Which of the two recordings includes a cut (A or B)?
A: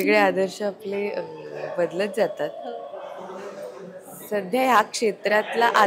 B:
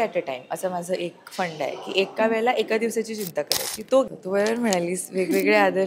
B